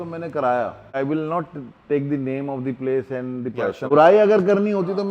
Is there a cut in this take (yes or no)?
yes